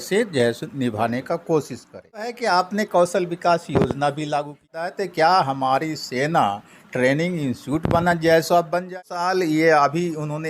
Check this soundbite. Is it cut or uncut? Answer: cut